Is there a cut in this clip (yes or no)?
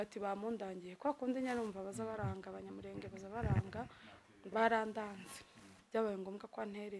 yes